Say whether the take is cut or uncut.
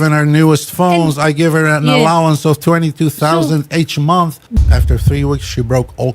cut